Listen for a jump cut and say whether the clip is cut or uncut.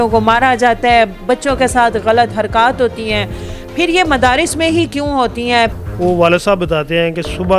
cut